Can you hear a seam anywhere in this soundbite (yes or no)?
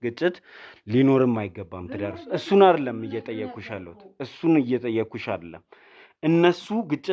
no